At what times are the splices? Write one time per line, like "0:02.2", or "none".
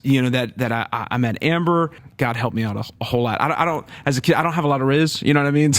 0:02.0